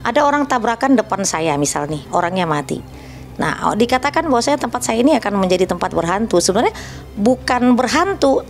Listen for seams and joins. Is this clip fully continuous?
yes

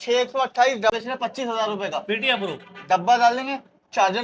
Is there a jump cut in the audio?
yes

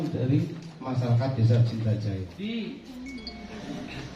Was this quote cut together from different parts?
yes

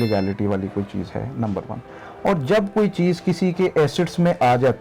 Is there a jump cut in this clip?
no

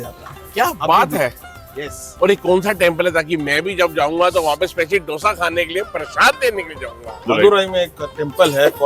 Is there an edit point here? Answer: no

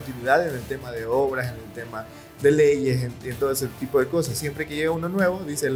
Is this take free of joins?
yes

